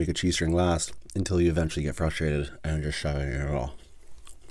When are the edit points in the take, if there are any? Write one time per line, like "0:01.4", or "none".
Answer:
0:01.0